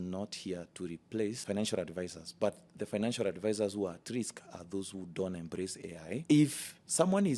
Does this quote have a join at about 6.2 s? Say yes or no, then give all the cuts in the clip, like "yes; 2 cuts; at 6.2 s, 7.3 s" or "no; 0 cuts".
yes; 1 cut; at 6.2 s